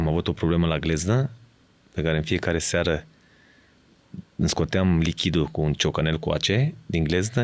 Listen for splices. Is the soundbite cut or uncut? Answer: uncut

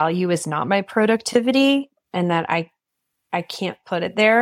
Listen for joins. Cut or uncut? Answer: uncut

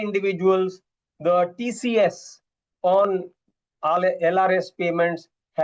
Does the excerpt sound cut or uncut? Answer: uncut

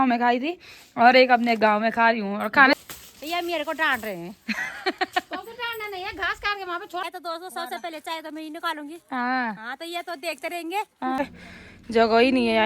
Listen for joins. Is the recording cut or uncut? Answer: cut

